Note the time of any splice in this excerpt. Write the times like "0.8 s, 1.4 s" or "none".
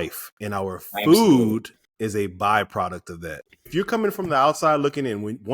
1.8 s, 3.7 s